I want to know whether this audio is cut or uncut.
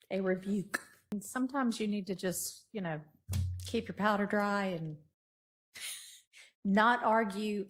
cut